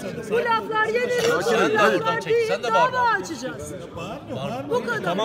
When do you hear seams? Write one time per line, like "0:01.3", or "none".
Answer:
none